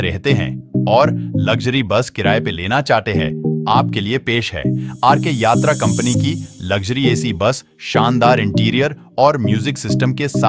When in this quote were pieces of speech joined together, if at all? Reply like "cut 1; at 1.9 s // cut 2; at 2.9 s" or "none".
none

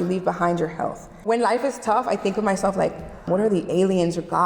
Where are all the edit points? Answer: cut 1; at 1.1 s // cut 2; at 3.1 s

